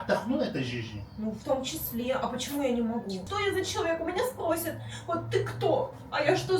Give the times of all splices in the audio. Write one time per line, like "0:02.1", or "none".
0:03.3